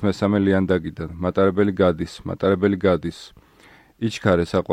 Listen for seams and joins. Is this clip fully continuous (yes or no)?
yes